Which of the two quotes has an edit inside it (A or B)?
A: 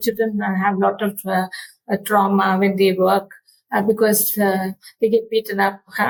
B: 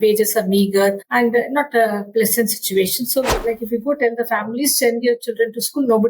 B